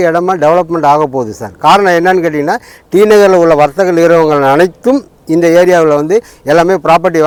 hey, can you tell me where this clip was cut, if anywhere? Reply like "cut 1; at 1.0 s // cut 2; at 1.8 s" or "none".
none